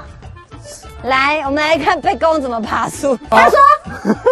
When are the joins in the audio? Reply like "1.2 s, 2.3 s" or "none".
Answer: 3.3 s